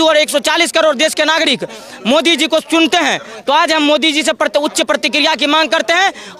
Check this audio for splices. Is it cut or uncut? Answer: uncut